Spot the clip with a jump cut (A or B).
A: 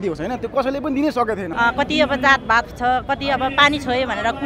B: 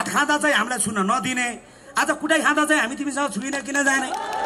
A